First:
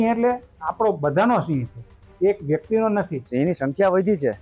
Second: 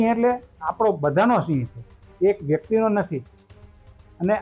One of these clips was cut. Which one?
first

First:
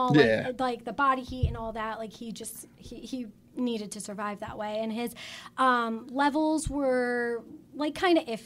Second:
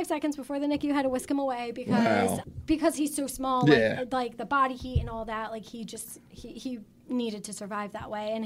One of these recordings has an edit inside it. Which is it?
second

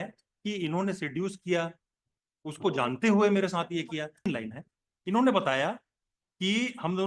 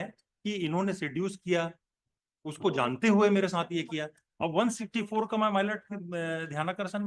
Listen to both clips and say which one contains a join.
first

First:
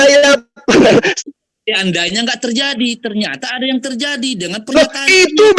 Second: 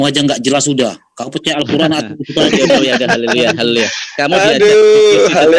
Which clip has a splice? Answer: first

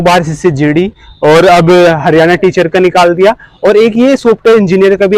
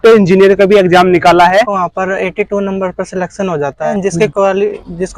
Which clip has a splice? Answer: second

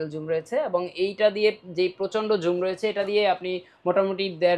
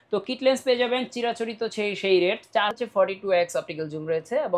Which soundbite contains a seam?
second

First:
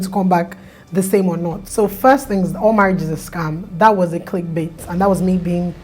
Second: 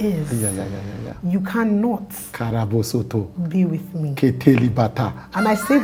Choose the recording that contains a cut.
first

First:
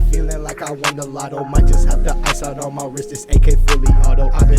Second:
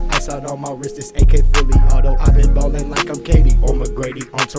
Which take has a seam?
first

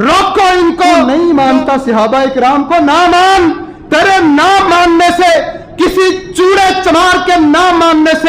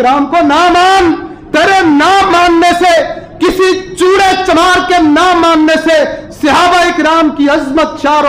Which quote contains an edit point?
first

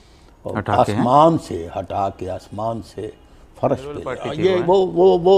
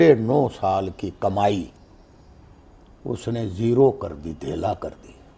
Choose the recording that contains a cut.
first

